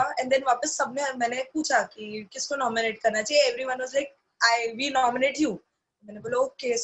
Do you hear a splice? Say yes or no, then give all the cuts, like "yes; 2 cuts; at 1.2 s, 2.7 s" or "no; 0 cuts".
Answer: no; 0 cuts